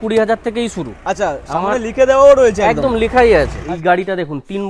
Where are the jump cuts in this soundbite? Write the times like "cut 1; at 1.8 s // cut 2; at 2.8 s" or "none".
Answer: cut 1; at 3.6 s